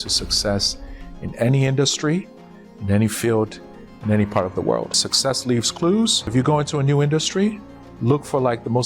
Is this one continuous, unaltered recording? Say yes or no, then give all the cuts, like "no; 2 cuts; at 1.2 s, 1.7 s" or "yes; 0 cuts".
no; 2 cuts; at 5.1 s, 6.3 s